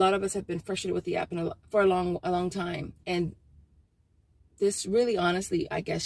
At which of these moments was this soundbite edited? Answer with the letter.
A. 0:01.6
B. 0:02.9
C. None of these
B